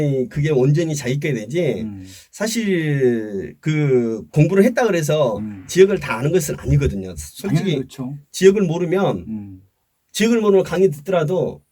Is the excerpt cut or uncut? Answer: uncut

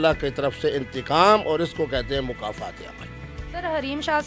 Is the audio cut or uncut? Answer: uncut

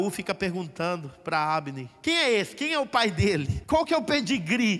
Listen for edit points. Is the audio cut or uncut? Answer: cut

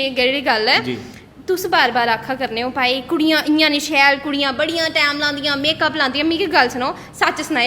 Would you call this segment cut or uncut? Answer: uncut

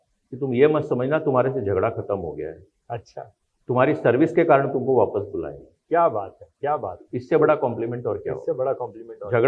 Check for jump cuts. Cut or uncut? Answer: uncut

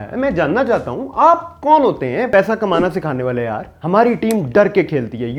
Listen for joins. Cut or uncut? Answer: cut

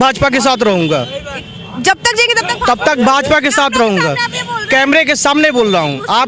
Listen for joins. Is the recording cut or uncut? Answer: uncut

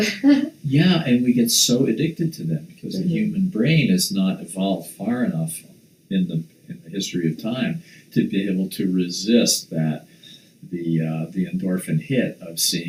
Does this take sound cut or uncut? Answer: uncut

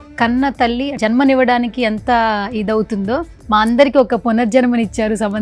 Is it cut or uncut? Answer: cut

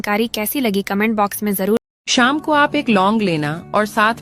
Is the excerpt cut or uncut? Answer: cut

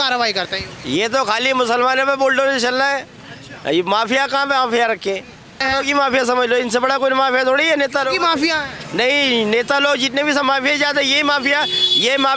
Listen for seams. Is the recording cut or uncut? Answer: cut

